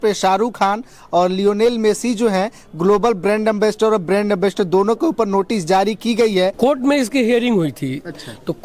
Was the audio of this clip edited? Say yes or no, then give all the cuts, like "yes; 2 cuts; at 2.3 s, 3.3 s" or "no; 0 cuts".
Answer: yes; 1 cut; at 6.5 s